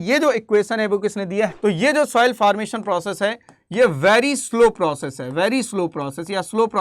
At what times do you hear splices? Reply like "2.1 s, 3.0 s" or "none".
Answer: 1.5 s